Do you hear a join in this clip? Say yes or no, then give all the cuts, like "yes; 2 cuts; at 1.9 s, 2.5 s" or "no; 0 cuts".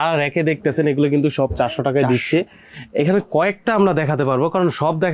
no; 0 cuts